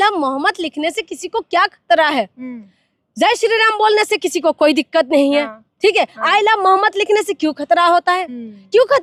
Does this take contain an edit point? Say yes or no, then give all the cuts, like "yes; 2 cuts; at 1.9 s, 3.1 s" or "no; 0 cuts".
no; 0 cuts